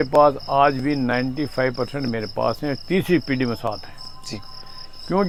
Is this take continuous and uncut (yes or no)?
yes